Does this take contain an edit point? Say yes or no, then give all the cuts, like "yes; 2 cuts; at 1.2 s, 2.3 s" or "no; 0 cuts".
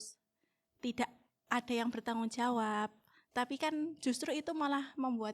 no; 0 cuts